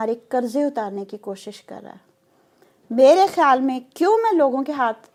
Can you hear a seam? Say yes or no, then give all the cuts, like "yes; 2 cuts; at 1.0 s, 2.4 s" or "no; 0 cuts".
no; 0 cuts